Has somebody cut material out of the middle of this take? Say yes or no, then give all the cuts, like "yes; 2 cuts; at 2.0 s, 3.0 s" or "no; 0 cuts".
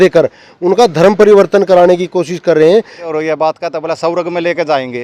yes; 1 cut; at 3.0 s